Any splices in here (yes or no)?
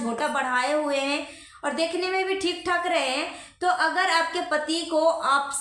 no